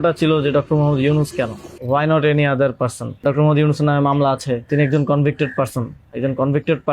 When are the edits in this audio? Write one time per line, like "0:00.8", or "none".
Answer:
0:01.7
0:03.2
0:04.7